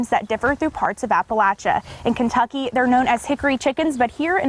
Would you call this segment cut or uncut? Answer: uncut